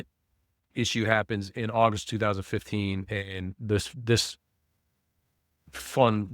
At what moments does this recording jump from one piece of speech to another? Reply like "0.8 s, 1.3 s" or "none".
none